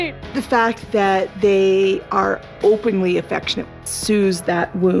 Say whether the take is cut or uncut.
uncut